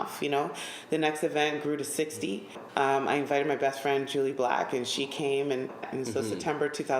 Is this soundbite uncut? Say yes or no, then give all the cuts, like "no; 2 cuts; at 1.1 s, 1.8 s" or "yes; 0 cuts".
no; 2 cuts; at 2.5 s, 5.9 s